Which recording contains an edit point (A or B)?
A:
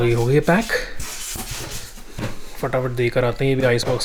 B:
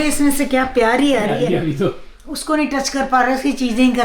B